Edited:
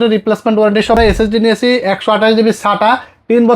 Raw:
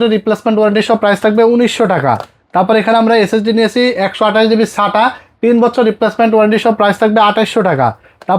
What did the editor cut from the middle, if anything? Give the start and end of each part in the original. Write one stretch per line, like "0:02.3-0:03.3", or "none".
0:01.0-0:03.1

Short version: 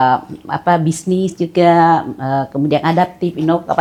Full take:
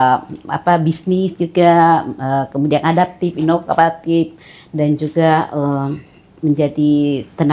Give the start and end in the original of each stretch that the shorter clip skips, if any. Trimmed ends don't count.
none

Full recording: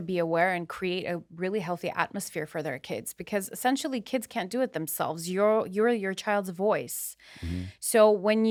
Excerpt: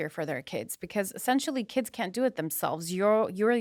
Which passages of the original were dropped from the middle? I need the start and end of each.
none

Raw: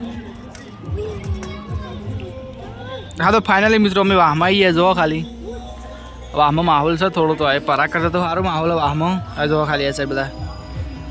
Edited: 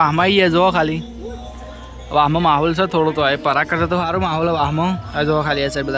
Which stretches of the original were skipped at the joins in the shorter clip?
none

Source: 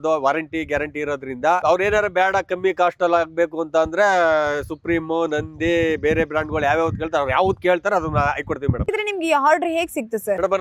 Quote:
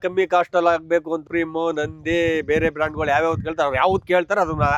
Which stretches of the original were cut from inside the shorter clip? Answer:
0:03.6-0:04.7

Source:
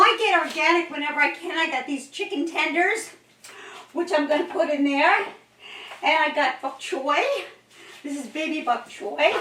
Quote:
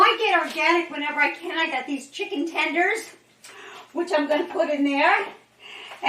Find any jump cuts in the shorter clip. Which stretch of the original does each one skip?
none

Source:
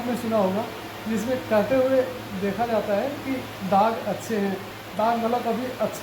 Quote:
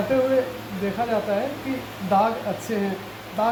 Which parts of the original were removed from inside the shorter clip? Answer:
none

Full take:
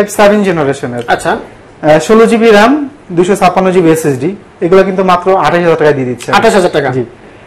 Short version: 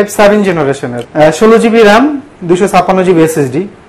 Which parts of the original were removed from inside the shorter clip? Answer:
0:00.9-0:01.6

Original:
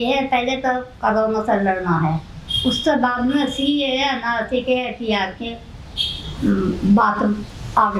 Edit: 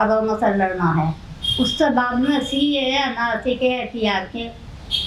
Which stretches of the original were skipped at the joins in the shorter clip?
none

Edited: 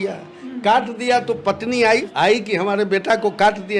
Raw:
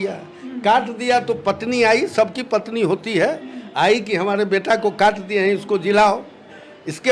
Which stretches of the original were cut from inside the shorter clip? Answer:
0:02.1-0:03.7

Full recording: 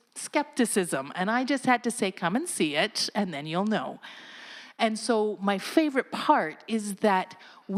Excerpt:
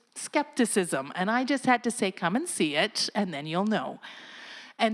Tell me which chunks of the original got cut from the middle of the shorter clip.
none

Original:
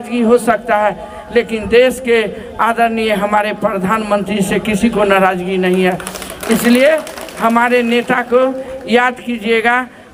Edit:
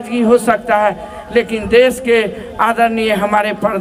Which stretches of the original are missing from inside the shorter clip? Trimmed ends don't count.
none

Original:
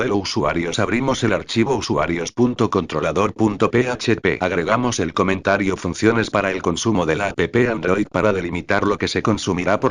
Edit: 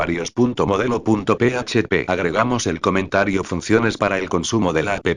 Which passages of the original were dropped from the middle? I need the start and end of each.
0:03.0-0:03.3

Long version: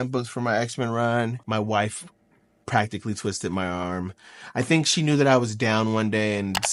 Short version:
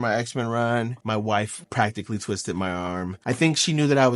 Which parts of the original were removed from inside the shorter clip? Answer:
0:02.0-0:02.6
0:04.1-0:04.4

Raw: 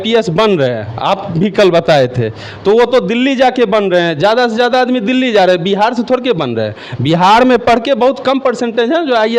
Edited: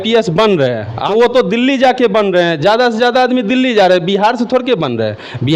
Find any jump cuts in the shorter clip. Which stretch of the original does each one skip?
0:00.9-0:02.5

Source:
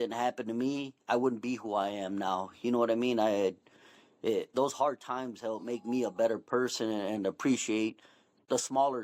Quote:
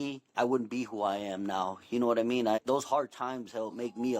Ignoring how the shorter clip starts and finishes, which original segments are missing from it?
0:03.3-0:04.5

